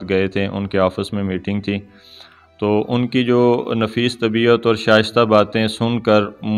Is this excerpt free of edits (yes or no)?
yes